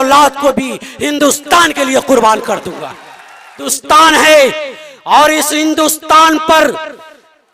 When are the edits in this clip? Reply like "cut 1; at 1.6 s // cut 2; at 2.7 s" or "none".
cut 1; at 3.8 s